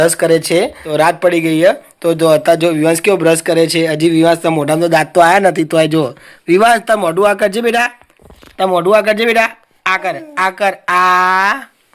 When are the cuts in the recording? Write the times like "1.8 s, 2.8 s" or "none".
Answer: 0.9 s